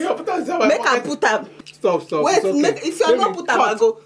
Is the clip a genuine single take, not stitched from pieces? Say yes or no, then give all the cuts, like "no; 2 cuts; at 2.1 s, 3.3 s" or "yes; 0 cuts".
no; 1 cut; at 1.5 s